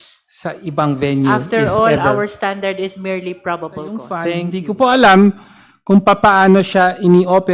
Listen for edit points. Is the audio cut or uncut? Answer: cut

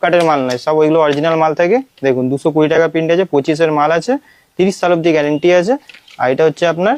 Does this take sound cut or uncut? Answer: uncut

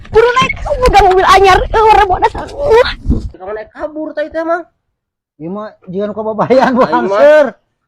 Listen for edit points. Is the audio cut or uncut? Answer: cut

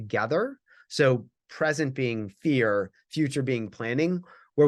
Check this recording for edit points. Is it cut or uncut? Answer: uncut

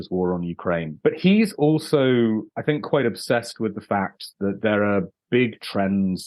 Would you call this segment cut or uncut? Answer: cut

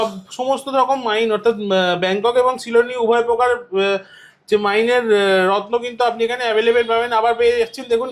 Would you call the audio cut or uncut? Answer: uncut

